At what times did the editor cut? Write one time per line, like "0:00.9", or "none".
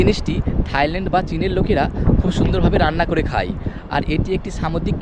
none